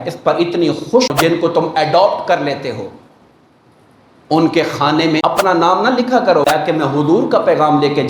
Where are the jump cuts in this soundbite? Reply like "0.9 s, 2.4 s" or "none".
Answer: 1.1 s, 5.2 s, 6.5 s

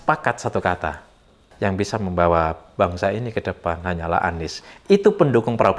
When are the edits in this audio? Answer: 1.5 s

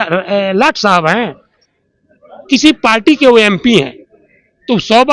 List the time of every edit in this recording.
none

